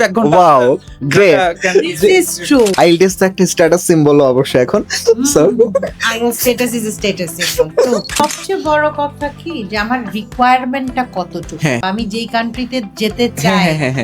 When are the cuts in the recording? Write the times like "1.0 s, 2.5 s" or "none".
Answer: 2.7 s, 8.2 s